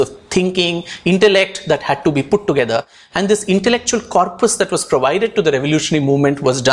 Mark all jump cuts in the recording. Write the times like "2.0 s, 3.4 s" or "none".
none